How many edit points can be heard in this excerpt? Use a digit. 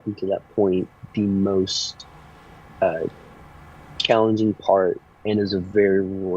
1